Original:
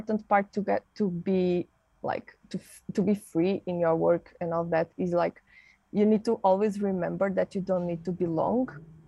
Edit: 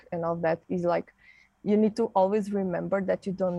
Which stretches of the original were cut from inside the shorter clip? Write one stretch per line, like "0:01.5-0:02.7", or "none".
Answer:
none